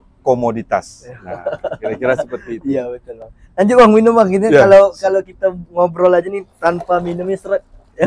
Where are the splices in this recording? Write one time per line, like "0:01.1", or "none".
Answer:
none